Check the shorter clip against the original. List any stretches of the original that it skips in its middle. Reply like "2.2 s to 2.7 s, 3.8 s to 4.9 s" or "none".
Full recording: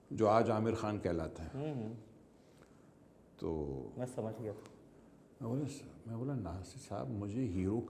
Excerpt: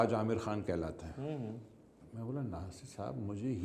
2.4 s to 5.9 s